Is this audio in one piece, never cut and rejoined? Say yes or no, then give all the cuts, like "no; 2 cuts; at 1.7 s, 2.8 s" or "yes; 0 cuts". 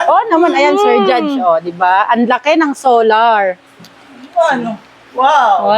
yes; 0 cuts